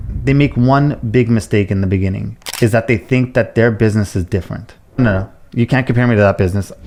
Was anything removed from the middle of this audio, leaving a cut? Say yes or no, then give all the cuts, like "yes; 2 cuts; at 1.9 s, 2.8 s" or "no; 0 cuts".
no; 0 cuts